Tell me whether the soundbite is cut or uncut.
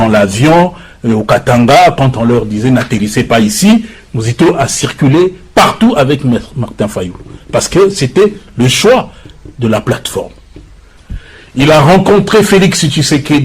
cut